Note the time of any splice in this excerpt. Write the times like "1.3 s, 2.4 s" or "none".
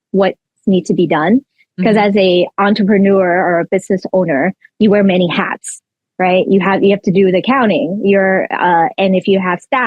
none